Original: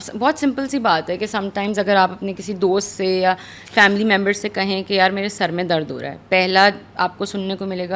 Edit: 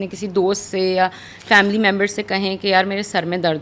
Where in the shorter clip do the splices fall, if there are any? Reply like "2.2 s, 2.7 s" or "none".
none